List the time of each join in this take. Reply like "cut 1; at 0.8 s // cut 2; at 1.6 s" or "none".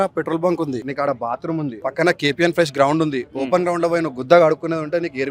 cut 1; at 0.9 s // cut 2; at 1.8 s